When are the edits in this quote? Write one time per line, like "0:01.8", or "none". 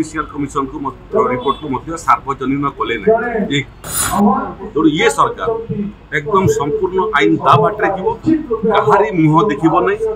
0:04.0